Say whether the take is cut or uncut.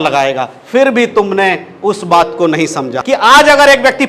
cut